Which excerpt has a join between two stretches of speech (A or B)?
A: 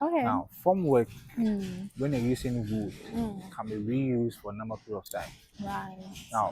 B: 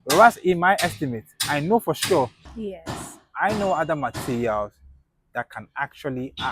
B